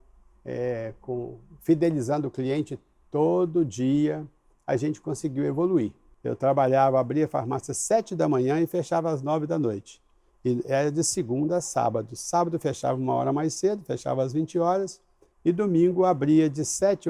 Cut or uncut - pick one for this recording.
cut